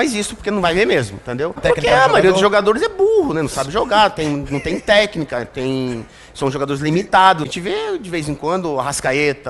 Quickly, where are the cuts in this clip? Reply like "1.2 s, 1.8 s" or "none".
1.6 s, 7.5 s